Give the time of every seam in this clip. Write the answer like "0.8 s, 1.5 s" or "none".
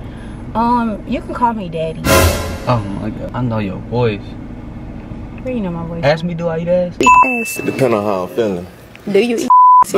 3.3 s

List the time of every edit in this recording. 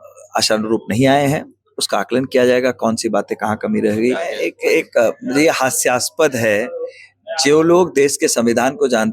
4.3 s

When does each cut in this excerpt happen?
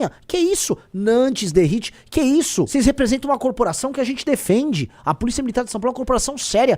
2.7 s

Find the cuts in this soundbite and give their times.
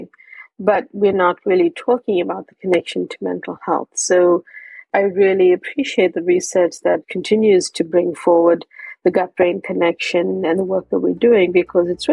4.8 s, 7.1 s

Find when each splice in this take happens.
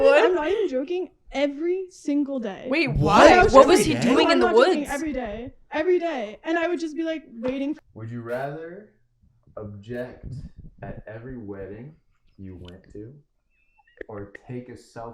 7.9 s

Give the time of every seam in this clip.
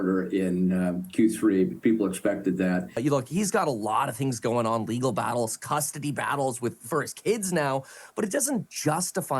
2.9 s

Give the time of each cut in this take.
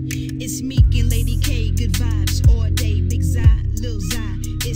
none

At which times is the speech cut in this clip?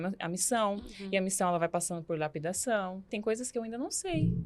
3.1 s

